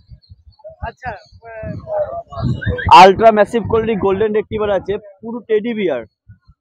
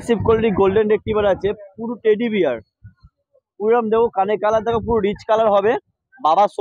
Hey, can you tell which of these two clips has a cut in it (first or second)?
first